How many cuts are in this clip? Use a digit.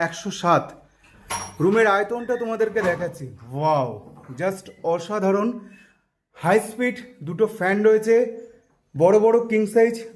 0